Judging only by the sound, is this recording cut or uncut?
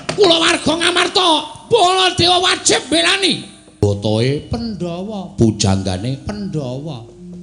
cut